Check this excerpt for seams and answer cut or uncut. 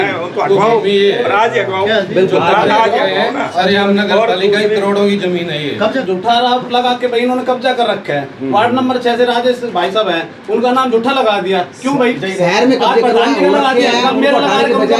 cut